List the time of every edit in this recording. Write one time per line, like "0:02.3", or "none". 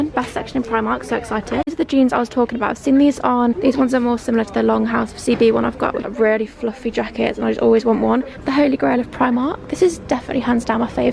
0:01.7
0:03.6
0:06.1
0:08.4